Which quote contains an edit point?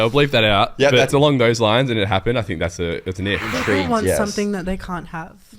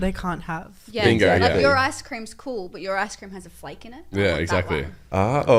first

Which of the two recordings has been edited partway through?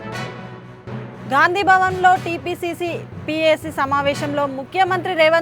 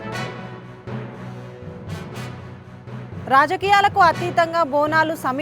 second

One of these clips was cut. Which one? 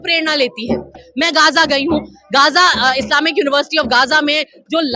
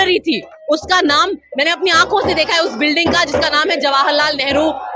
first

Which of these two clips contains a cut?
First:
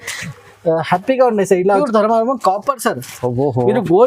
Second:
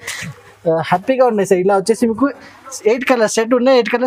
first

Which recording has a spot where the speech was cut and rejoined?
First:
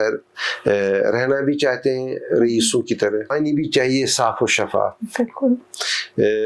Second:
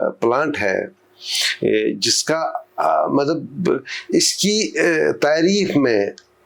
first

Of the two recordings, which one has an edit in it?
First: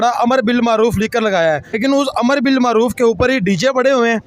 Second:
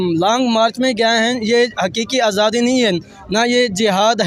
first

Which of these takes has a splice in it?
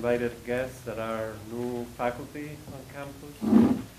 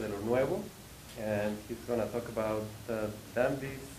first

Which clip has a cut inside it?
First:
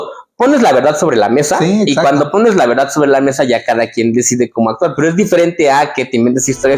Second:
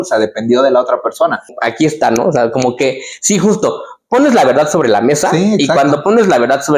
second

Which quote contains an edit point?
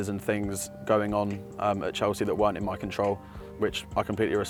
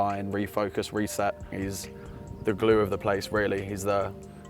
second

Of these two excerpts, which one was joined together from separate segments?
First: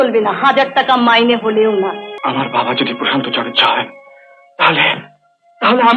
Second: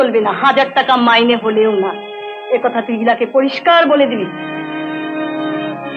first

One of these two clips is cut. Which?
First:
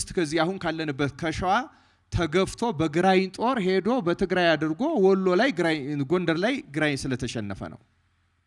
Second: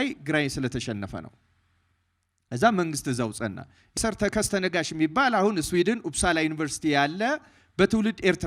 second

